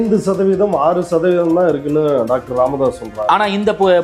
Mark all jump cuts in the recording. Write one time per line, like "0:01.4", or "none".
none